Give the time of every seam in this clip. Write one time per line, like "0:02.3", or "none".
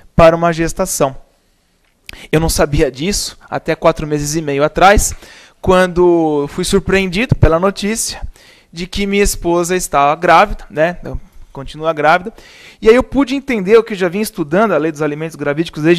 0:06.5

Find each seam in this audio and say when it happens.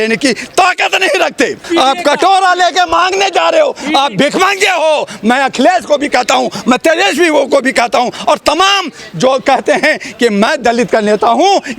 0:01.6

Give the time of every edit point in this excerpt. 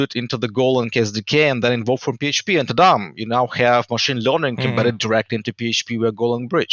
none

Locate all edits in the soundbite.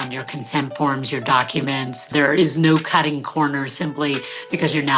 0:02.1

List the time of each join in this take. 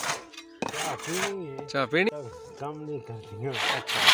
0:02.1

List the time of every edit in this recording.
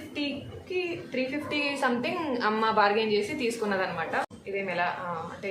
0:04.4

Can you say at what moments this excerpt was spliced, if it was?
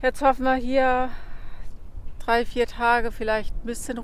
none

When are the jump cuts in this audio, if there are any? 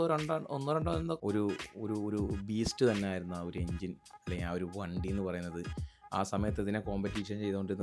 0:01.2

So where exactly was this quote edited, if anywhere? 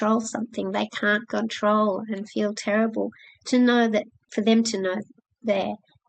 0:04.2

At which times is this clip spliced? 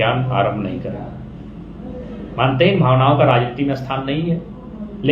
none

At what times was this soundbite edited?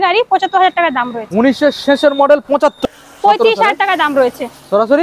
0:02.8

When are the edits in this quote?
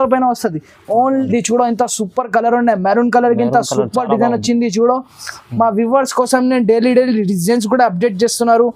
0:01.3

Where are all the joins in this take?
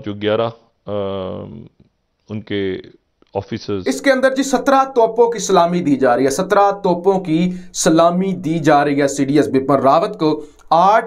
0:03.8

